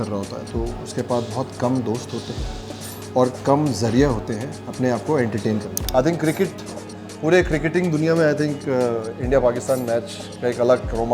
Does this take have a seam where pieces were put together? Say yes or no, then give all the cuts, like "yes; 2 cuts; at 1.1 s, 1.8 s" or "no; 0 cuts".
yes; 1 cut; at 5.8 s